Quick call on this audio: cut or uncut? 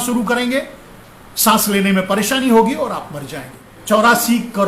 cut